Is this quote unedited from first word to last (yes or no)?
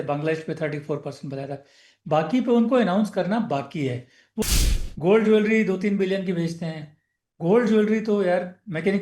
no